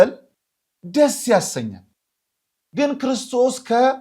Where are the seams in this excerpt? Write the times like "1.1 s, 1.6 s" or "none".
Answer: none